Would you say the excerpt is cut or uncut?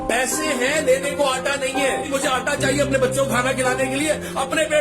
cut